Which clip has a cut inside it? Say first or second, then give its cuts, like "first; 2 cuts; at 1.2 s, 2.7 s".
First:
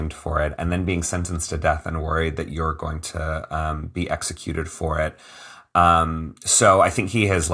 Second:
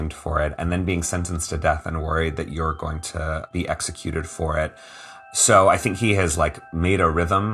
second; 2 cuts; at 3.5 s, 5.2 s